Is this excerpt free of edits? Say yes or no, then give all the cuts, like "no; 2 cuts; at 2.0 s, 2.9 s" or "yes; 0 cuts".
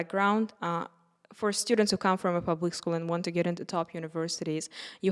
yes; 0 cuts